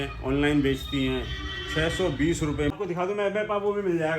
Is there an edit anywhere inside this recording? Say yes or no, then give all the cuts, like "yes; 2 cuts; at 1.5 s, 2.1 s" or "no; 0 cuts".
yes; 1 cut; at 2.7 s